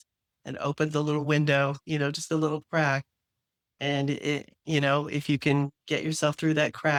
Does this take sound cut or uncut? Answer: uncut